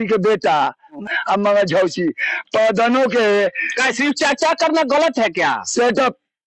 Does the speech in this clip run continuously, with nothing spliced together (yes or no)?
no